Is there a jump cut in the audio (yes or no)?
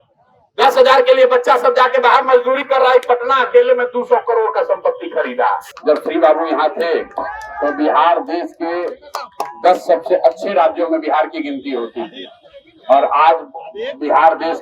yes